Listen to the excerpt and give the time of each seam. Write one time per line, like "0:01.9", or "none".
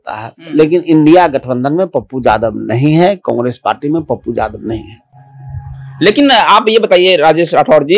none